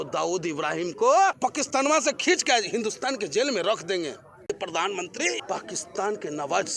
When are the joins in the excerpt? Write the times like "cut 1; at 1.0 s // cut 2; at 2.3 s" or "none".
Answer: cut 1; at 1.4 s // cut 2; at 4.4 s // cut 3; at 5.4 s